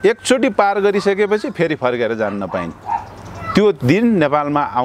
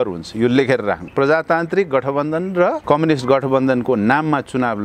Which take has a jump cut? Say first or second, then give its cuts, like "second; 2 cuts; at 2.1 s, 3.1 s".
second; 2 cuts; at 1.1 s, 2.8 s